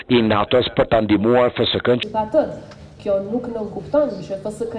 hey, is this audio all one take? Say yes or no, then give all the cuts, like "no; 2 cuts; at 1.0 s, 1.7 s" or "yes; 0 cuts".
no; 1 cut; at 2.0 s